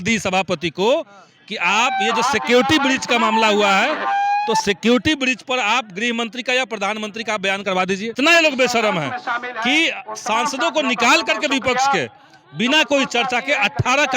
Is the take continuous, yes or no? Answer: no